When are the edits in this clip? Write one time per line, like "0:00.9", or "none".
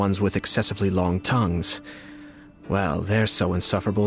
none